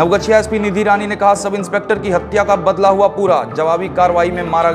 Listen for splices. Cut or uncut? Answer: uncut